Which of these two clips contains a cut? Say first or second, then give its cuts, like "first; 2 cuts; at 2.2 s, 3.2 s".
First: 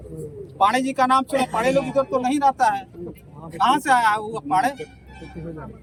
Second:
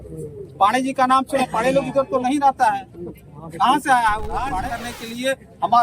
second; 1 cut; at 4.5 s